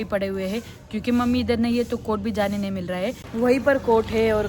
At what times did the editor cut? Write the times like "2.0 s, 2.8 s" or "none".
3.2 s